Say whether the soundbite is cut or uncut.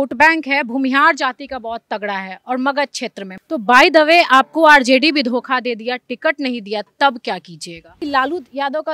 cut